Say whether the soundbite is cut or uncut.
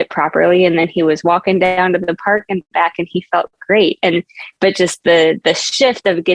uncut